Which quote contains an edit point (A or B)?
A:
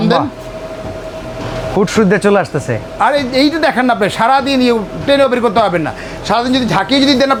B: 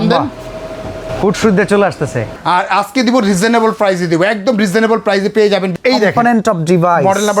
B